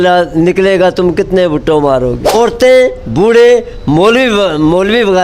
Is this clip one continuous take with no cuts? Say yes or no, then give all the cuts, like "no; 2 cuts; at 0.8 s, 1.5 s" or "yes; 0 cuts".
no; 1 cut; at 2.4 s